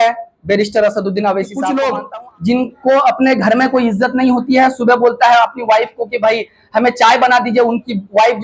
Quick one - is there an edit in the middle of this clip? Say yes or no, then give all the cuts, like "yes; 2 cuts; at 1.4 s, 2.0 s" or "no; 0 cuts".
yes; 1 cut; at 1.5 s